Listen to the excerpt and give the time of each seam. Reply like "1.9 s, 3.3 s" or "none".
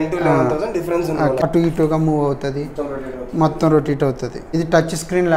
1.4 s, 4.4 s